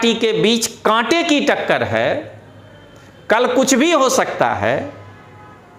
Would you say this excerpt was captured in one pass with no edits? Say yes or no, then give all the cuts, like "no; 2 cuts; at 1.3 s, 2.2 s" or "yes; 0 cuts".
yes; 0 cuts